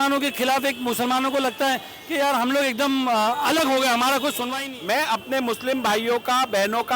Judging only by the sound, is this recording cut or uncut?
cut